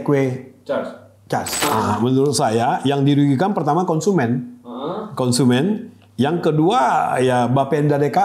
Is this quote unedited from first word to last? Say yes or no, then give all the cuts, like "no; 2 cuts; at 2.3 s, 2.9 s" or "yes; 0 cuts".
no; 1 cut; at 1.6 s